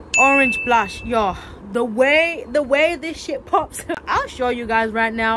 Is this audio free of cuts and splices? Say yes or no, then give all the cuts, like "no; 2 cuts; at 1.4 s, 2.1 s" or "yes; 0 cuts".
no; 1 cut; at 4.0 s